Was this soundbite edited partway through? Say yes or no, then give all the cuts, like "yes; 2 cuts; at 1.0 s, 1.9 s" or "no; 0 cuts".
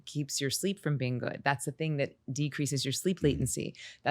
no; 0 cuts